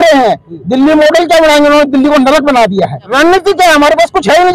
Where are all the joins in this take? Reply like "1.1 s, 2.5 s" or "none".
3.0 s